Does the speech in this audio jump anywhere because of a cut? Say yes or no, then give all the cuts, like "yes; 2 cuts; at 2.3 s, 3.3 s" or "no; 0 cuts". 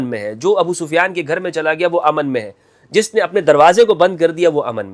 no; 0 cuts